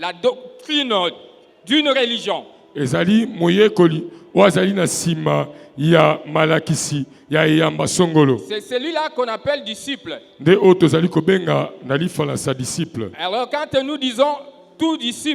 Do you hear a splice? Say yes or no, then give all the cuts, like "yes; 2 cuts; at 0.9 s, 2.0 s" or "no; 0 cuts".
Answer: no; 0 cuts